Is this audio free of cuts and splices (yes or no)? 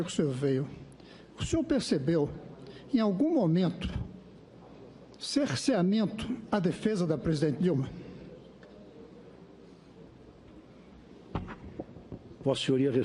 yes